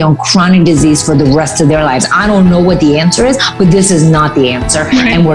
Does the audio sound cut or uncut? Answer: uncut